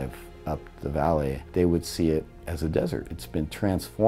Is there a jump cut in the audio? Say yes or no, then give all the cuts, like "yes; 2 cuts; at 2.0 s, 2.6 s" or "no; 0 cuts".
yes; 2 cuts; at 1.4 s, 3.1 s